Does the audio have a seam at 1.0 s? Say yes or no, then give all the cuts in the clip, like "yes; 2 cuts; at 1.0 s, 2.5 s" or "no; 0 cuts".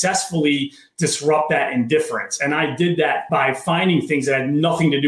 no; 1 cut; at 3.2 s